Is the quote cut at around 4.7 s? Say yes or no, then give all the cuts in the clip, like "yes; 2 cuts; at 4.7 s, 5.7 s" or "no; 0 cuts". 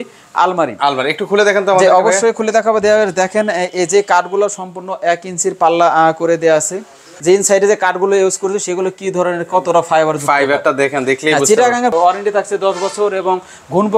no; 2 cuts; at 7.1 s, 11.9 s